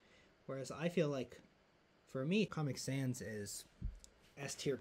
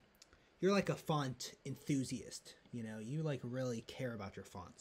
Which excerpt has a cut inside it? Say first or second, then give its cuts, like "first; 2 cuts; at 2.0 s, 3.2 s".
first; 1 cut; at 2.5 s